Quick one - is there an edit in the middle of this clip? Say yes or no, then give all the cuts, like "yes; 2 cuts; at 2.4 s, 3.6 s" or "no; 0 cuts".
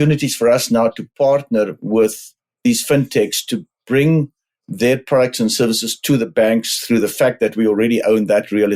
no; 0 cuts